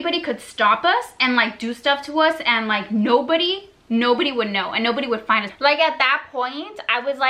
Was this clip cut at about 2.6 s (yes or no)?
no